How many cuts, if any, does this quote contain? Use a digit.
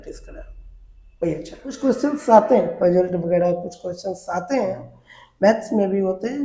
1